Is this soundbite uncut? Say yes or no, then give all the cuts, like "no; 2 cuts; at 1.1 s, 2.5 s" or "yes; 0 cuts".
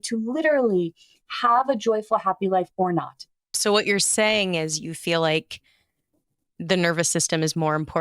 no; 1 cut; at 3.5 s